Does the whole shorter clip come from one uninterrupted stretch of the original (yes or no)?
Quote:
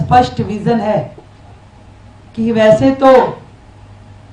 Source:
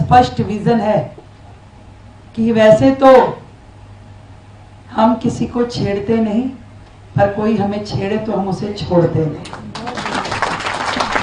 yes